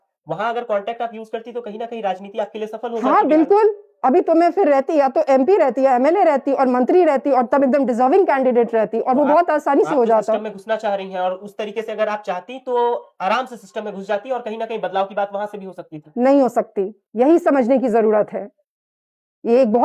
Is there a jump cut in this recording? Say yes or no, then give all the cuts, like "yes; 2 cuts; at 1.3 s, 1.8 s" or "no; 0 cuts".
no; 0 cuts